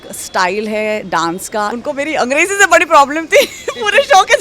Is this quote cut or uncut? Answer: cut